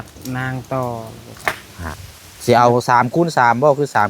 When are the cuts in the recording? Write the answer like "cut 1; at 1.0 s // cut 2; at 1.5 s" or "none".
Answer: cut 1; at 2.1 s